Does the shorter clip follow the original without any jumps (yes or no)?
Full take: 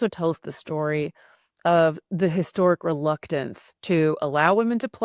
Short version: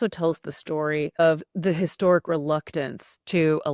no